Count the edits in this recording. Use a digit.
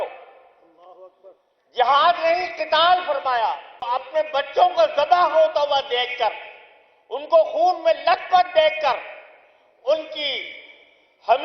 1